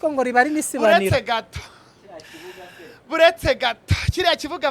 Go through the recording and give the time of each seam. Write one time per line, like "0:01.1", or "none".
none